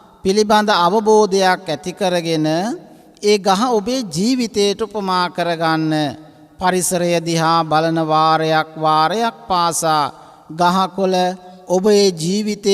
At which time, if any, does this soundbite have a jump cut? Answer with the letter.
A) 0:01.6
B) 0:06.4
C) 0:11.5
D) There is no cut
C